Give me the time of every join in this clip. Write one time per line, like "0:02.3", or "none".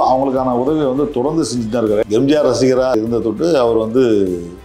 0:02.0
0:02.9

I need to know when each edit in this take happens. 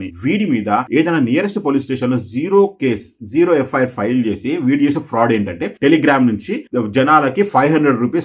none

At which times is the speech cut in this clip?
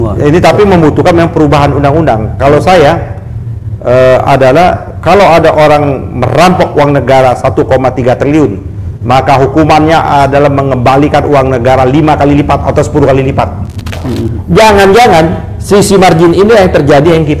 0:13.9

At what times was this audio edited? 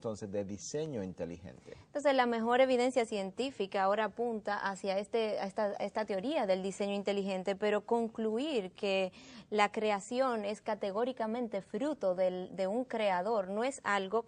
0:06.6

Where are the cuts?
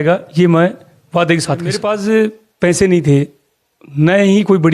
0:01.8

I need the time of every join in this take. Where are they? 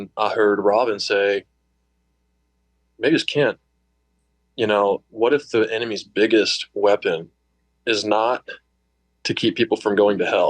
none

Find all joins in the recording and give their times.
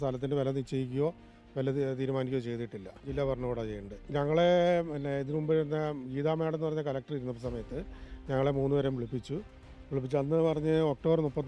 0:03.0
0:03.9

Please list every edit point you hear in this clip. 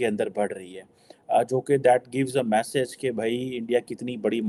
none

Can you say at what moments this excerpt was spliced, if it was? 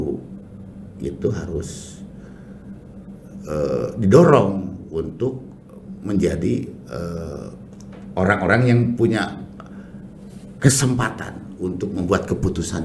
none

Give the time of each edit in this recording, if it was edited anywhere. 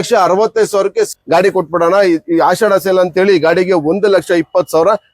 0:01.2

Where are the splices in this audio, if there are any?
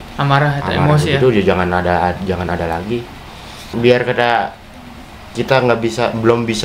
0:03.7

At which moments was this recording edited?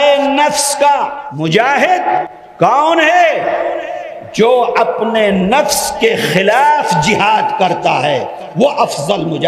0:01.2
0:02.3

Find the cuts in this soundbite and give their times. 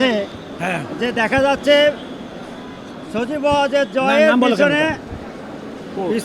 none

